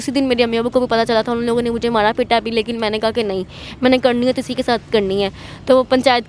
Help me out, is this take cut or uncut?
uncut